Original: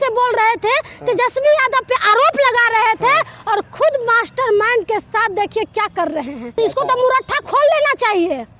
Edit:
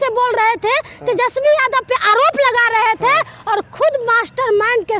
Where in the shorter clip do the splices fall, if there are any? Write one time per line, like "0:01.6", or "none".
none